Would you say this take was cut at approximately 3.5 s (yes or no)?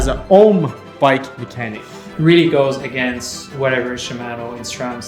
no